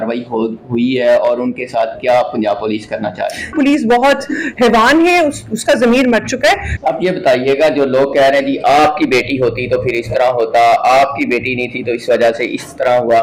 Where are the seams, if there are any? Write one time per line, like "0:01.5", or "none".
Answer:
0:03.5
0:06.7